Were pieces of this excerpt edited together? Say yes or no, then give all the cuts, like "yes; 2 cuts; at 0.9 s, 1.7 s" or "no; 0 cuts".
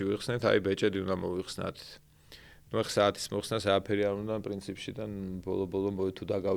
no; 0 cuts